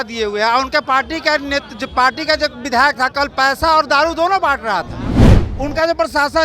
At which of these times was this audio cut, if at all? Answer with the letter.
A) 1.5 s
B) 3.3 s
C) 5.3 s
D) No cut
C